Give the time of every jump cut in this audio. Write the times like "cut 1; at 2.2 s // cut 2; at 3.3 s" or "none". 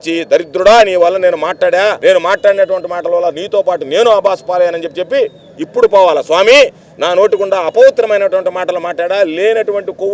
cut 1; at 2.0 s